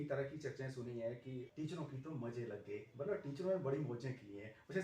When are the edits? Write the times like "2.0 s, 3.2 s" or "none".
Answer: 1.5 s